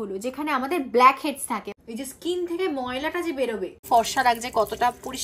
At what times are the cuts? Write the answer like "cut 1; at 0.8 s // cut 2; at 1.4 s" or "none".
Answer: cut 1; at 1.7 s // cut 2; at 3.8 s